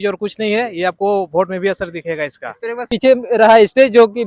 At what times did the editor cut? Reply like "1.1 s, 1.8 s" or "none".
2.9 s